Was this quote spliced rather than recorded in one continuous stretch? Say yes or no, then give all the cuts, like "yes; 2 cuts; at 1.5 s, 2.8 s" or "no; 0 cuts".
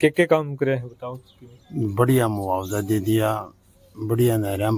no; 0 cuts